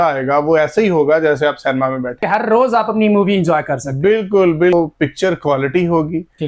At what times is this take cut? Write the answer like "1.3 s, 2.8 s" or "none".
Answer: 2.2 s, 4.7 s